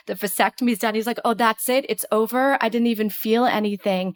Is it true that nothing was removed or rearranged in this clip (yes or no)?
yes